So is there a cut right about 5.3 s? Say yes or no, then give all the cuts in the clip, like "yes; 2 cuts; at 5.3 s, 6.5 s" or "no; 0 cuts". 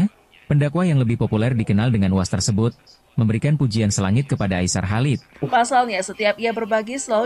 yes; 1 cut; at 5.3 s